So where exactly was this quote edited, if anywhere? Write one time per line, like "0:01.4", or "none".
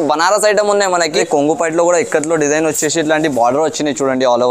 0:01.1